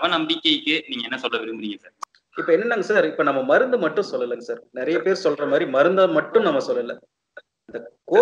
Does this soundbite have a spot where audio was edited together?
yes; 1 cut; at 1.9 s

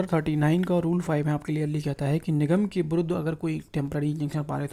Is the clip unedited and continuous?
yes; 0 cuts

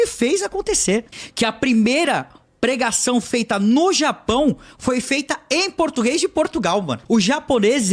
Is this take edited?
yes; 2 cuts; at 1.2 s, 7.0 s

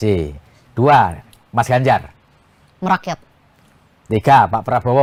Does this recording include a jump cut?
no; 0 cuts

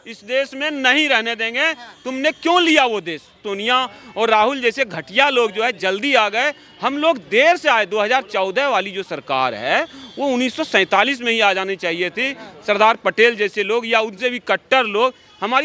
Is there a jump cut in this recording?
yes; 1 cut; at 3.5 s

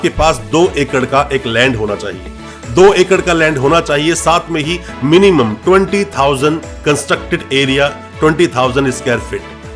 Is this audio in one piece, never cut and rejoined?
yes; 0 cuts

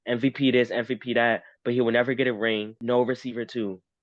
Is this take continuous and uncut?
no; 1 cut; at 2.8 s

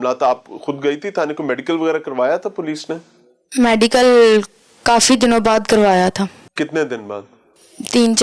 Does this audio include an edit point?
no; 0 cuts

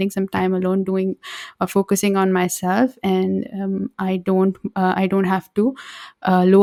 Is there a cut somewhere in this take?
no; 0 cuts

